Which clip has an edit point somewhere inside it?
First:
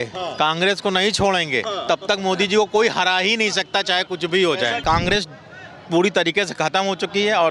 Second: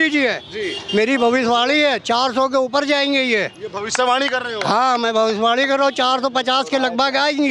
first; 1 cut; at 4.8 s

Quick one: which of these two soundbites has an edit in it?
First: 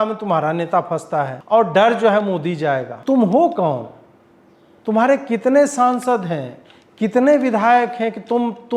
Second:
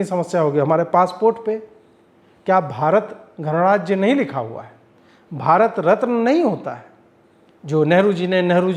first; 2 cuts; at 1.4 s, 2.9 s

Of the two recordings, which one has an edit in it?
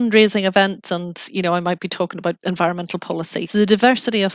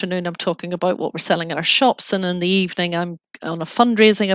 first; 2 cuts; at 2.4 s, 3.5 s

